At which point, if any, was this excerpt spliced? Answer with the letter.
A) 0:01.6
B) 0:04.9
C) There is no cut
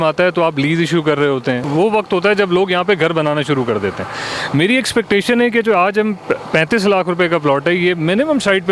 A